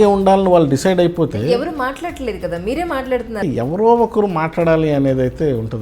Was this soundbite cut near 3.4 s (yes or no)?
yes